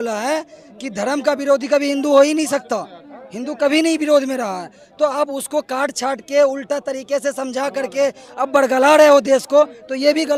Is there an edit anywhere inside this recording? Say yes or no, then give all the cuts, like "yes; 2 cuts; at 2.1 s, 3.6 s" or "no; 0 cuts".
no; 0 cuts